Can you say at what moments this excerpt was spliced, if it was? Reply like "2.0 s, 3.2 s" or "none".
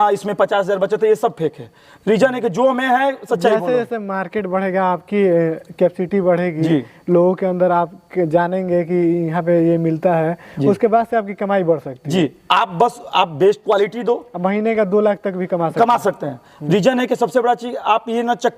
none

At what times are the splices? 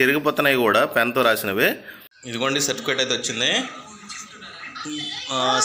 2.2 s

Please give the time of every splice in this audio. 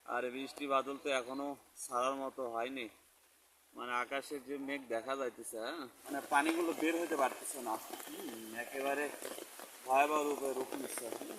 5.9 s

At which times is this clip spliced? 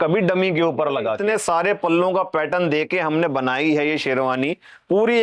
1.2 s

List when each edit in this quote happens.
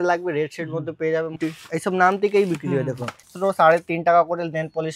1.4 s, 3.3 s

